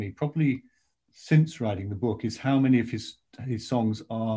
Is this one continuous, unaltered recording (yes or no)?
yes